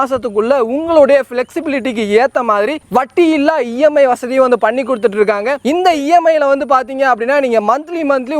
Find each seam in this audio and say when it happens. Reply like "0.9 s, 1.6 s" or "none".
none